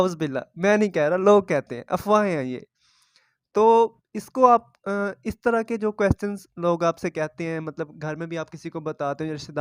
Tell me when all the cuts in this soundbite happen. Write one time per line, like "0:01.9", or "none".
none